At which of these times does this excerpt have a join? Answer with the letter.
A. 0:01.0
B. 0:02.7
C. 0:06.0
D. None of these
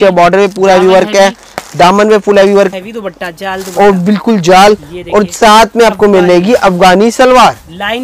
B